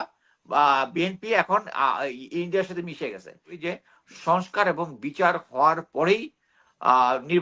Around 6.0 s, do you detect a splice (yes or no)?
no